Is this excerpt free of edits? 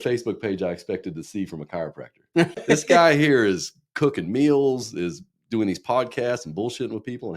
no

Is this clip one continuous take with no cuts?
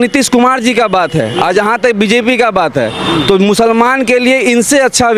yes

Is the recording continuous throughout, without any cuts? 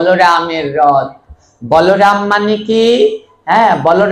yes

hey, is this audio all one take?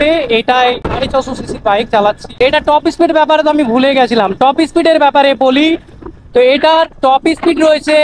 no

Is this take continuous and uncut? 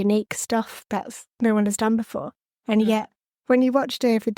yes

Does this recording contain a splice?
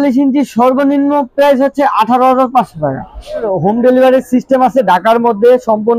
yes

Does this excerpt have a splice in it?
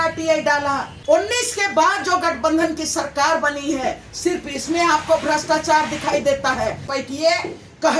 yes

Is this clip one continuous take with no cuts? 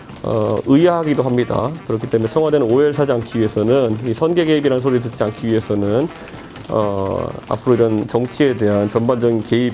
yes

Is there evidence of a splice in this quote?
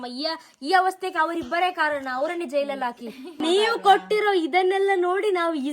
yes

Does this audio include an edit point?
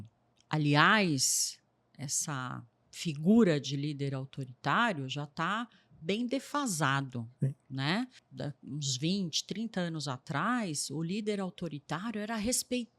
yes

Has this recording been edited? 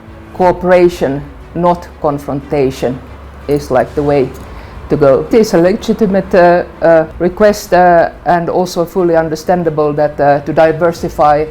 yes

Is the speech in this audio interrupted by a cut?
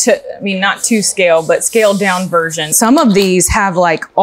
yes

